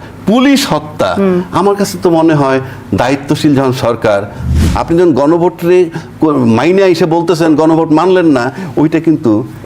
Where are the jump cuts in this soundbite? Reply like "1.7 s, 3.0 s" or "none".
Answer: 4.6 s